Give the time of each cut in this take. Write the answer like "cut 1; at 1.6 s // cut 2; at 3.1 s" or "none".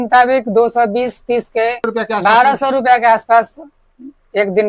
cut 1; at 1.9 s